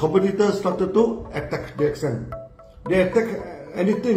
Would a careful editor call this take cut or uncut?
uncut